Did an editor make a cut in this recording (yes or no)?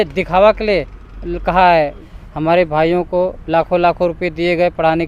yes